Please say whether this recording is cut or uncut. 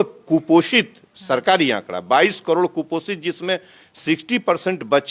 uncut